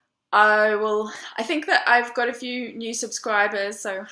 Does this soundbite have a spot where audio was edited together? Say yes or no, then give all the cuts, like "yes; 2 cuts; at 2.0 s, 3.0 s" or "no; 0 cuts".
no; 0 cuts